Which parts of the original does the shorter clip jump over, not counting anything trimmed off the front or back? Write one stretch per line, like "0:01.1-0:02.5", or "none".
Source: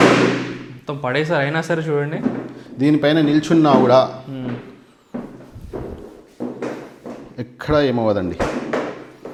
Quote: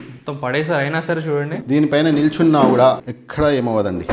0:02.1-0:02.6
0:04.3-0:07.5

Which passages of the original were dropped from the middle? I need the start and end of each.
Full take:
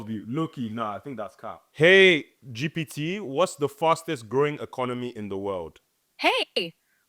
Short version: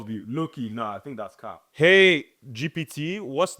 none

